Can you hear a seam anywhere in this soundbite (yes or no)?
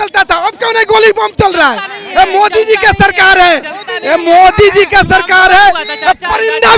no